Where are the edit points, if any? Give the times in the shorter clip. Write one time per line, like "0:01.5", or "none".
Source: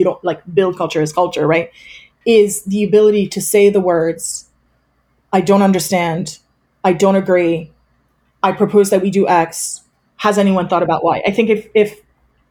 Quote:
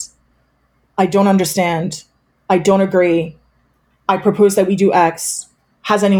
none